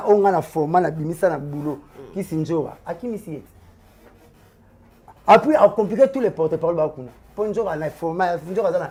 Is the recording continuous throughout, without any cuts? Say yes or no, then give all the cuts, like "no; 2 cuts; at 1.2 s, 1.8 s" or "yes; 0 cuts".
yes; 0 cuts